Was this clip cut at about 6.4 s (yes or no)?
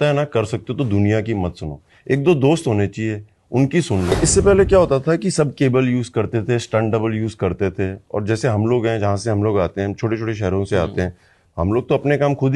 no